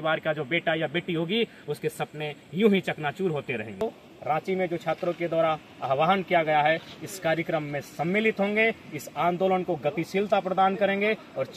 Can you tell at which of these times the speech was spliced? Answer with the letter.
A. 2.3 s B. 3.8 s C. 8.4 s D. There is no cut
B